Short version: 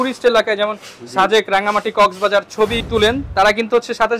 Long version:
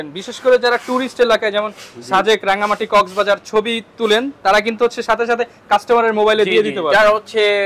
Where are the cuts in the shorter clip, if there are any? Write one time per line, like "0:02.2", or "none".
0:02.8